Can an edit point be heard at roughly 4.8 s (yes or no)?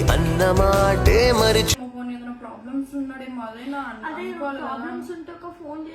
no